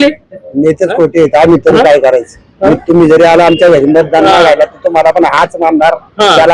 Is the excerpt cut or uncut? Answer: uncut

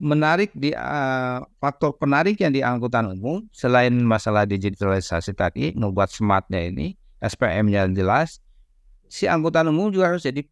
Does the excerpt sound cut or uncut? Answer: uncut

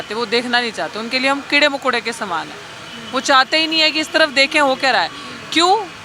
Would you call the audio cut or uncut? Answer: uncut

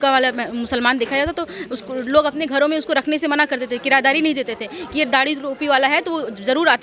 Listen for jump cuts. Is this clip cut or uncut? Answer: uncut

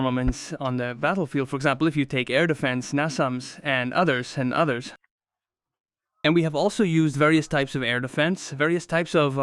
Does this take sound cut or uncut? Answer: uncut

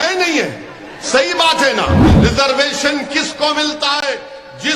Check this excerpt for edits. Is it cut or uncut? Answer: cut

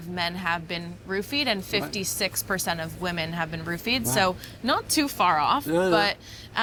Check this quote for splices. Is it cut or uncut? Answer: uncut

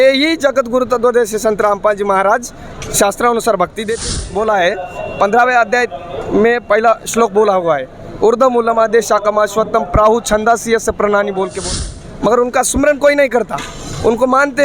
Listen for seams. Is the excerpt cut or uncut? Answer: cut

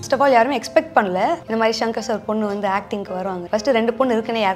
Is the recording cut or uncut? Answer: cut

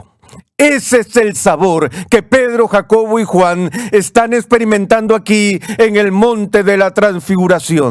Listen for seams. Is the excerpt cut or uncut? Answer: uncut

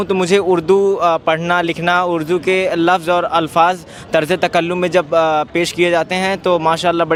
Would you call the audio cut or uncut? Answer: uncut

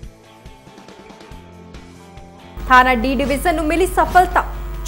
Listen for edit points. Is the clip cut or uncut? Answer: cut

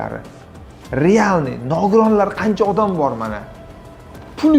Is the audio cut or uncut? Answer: uncut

